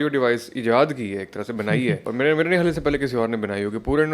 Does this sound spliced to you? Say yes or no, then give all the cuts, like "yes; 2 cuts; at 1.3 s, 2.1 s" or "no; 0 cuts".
yes; 1 cut; at 2.0 s